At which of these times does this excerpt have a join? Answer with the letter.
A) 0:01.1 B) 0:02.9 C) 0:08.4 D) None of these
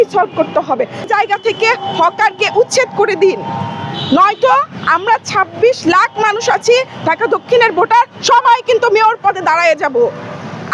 A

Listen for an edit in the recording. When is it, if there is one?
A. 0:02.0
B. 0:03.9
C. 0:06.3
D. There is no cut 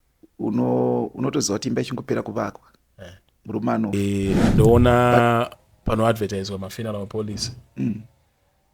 B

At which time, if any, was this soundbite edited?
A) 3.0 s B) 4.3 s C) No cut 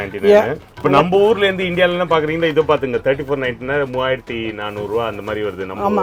C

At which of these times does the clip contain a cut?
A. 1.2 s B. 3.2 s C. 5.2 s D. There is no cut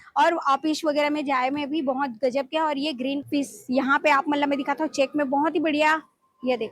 B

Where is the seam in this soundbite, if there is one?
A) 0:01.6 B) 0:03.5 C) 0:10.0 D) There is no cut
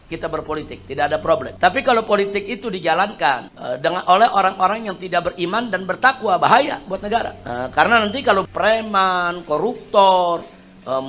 D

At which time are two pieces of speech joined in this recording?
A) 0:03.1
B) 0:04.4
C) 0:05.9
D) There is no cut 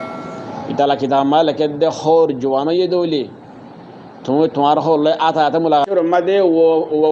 C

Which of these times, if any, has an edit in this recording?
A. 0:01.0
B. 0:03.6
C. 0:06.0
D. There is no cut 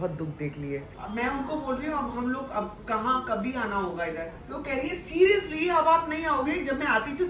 A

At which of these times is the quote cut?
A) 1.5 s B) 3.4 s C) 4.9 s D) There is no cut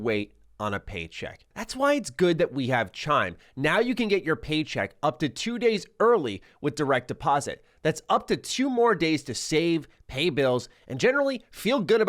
A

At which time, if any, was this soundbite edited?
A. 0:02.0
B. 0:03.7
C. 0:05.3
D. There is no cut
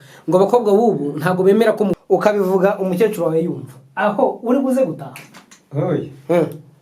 A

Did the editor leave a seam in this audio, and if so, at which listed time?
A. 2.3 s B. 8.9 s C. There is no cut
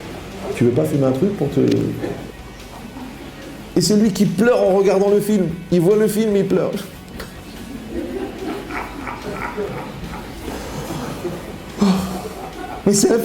A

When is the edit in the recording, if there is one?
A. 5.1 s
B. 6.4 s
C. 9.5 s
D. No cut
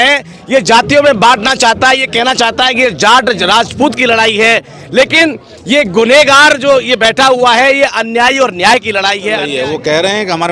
C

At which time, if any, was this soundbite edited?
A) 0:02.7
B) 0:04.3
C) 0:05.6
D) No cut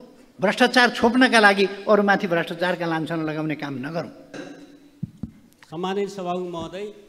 B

